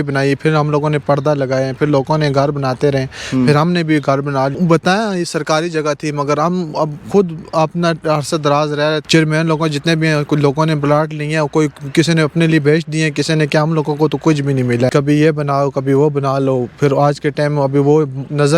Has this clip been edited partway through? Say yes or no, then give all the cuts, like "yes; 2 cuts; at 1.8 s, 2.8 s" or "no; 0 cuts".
yes; 3 cuts; at 4.5 s, 9.0 s, 14.9 s